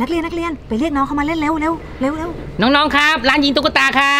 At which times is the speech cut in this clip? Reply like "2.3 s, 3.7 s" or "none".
none